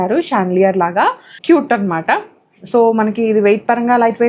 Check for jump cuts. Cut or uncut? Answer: cut